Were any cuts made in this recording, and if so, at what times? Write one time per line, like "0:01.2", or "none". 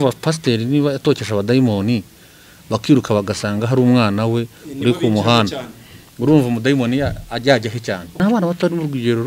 0:08.2